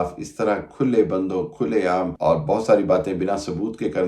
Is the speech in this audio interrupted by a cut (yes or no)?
yes